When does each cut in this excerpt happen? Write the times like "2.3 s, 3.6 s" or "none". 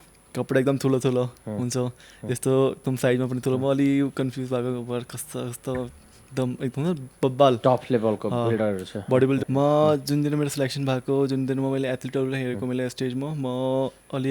9.4 s

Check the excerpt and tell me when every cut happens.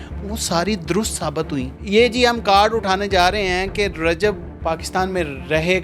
1.8 s, 4.5 s

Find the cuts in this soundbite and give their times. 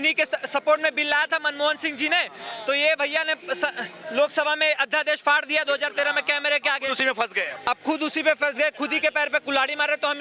none

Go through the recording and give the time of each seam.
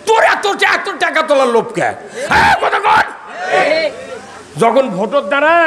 3.5 s

